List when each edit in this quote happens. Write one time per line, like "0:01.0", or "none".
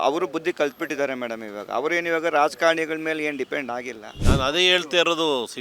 0:04.1